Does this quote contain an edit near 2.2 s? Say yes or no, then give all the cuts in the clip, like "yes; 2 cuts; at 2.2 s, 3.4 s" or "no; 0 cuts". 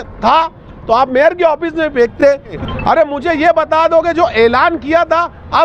yes; 1 cut; at 2.2 s